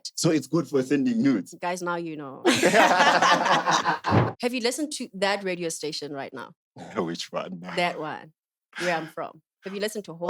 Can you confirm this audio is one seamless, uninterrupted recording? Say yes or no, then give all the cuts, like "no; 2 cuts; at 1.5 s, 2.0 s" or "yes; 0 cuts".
no; 1 cut; at 4.3 s